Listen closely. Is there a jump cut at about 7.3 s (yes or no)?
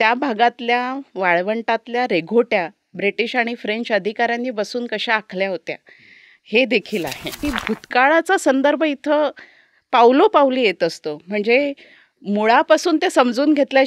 yes